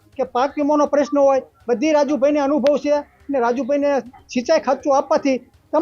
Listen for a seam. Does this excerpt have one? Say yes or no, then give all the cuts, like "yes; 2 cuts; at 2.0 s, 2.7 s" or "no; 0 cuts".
no; 0 cuts